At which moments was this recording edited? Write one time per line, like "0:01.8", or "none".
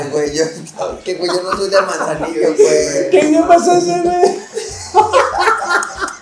none